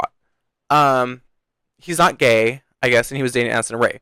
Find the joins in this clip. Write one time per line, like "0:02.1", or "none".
none